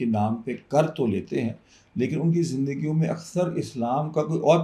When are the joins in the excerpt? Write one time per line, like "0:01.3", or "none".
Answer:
none